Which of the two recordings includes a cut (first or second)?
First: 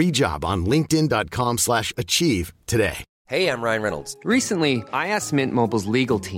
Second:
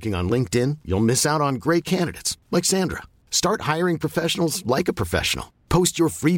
first